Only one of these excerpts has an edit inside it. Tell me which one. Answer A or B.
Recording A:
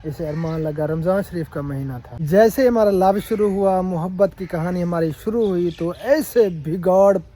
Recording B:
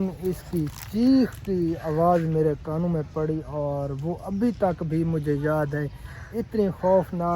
A